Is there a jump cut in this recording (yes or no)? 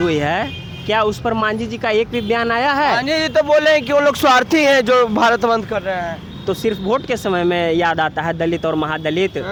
no